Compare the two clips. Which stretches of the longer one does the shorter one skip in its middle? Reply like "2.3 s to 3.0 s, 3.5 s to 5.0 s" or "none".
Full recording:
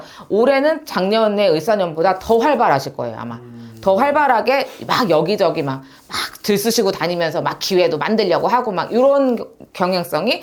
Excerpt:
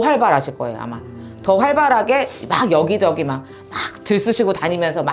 none